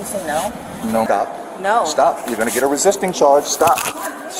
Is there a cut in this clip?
yes; 1 cut; at 1.1 s

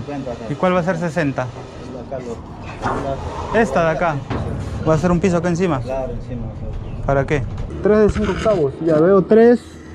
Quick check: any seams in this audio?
yes; 2 cuts; at 4.3 s, 7.7 s

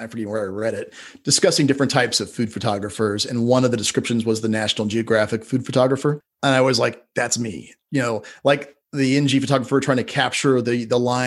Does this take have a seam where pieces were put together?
yes; 1 cut; at 6.3 s

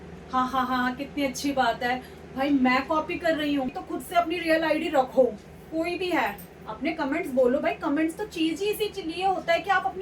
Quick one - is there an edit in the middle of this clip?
yes; 1 cut; at 3.7 s

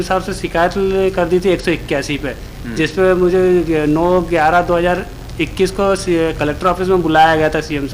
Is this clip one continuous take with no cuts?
yes; 0 cuts

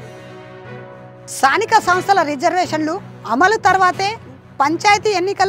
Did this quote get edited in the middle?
yes; 1 cut; at 1.2 s

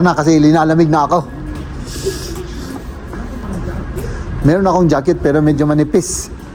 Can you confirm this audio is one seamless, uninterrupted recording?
yes; 0 cuts

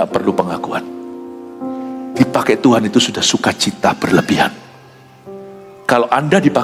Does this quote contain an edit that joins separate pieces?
no; 0 cuts

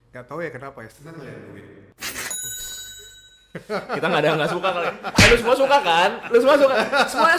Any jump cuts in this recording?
no; 0 cuts

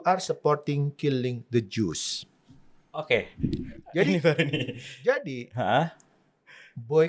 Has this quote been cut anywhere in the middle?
no; 0 cuts

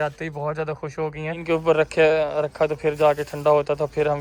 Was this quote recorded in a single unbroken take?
no; 1 cut; at 1.4 s

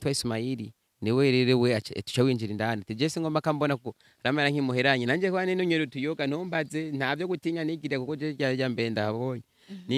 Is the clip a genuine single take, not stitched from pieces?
yes; 0 cuts

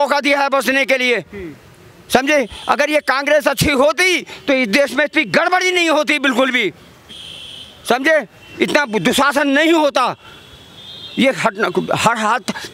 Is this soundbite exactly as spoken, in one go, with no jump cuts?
yes; 0 cuts

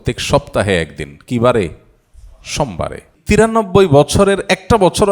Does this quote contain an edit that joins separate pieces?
yes; 1 cut; at 3.2 s

